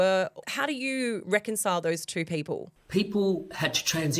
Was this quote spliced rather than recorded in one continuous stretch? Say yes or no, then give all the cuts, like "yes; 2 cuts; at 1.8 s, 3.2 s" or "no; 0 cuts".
yes; 1 cut; at 2.7 s